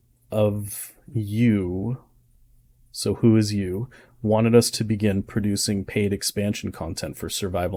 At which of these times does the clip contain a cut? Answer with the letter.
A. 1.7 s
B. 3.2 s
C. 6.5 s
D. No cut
D